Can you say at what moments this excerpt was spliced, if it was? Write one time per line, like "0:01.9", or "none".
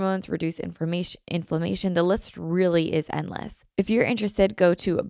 0:03.6

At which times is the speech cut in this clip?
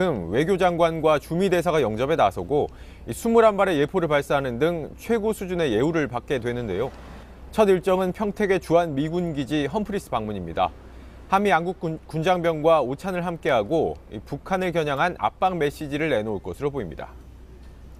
none

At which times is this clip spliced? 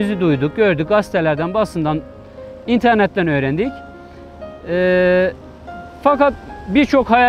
none

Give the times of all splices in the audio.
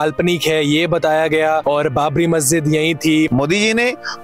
0:01.6
0:03.3

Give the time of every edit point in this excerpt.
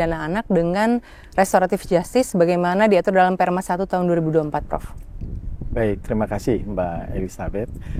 none

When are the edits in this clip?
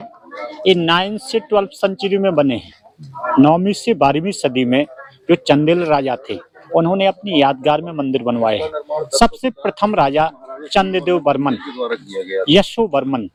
none

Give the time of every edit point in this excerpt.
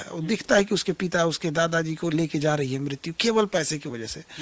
none

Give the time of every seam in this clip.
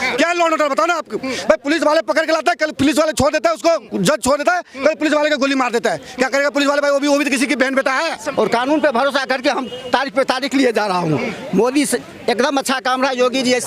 0:08.2

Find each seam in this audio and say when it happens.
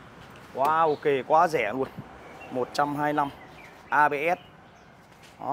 none

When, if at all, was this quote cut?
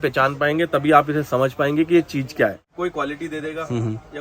0:02.6

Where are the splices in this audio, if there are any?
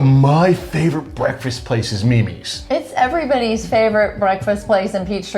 0:02.5

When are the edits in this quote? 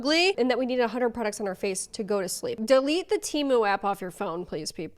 0:02.6

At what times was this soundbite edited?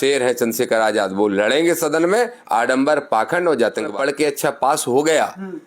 0:03.9

